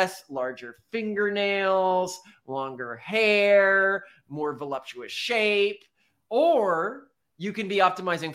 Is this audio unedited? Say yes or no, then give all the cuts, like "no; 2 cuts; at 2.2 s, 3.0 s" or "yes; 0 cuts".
yes; 0 cuts